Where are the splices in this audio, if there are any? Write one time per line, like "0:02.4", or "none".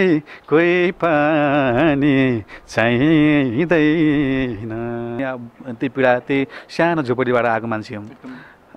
0:05.2